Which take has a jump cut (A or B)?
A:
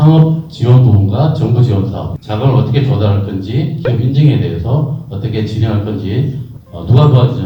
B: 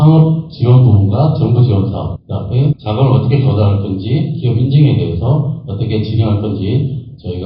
A